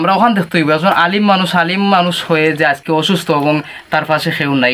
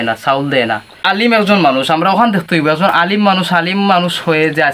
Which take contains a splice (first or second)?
second